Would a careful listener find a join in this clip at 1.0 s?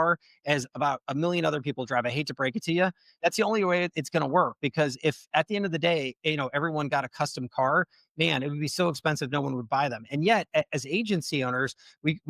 no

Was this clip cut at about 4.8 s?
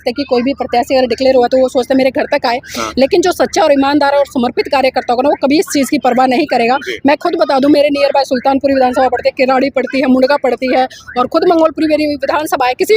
no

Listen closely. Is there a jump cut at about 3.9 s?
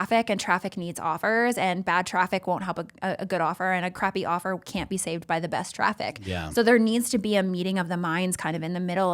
yes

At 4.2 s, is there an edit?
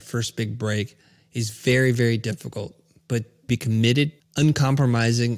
yes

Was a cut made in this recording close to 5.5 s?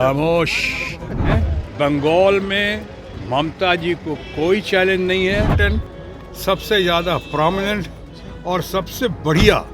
yes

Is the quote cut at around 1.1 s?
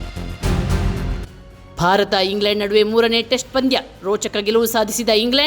yes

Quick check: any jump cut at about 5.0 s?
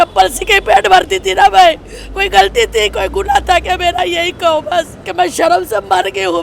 yes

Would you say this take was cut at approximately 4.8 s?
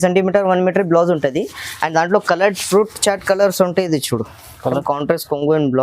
yes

